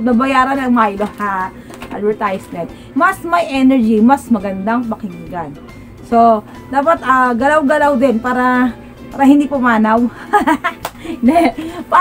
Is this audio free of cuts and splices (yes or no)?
no